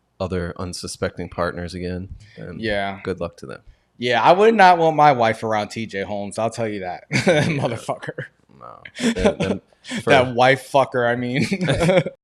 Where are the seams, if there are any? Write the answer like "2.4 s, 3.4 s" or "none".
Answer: none